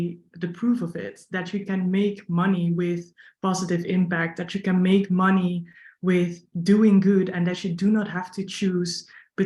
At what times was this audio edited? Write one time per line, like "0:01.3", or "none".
none

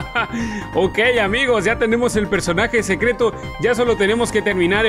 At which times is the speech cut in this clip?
none

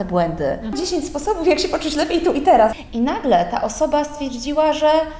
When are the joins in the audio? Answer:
0:00.8
0:02.8

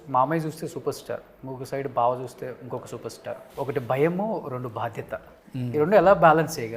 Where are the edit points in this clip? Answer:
0:03.5

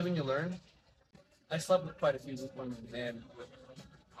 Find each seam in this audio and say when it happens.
0:01.1

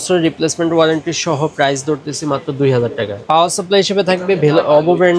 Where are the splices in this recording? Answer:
0:03.2

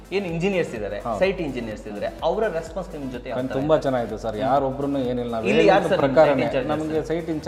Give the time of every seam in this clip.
none

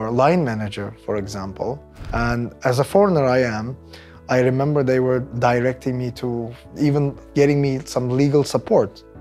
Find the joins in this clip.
0:01.9
0:05.3
0:07.2

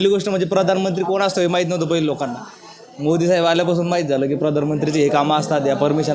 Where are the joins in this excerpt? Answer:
none

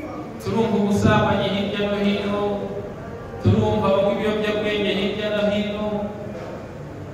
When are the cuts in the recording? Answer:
none

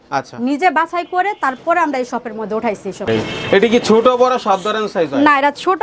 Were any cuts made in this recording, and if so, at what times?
0:03.1

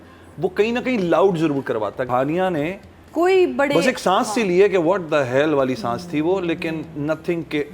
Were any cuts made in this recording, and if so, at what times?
0:02.1

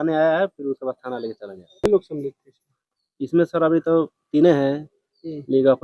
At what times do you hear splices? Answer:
0:01.8

